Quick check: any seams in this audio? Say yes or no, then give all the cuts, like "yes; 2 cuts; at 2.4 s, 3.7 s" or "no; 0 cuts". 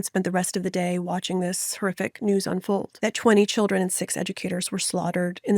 yes; 1 cut; at 2.9 s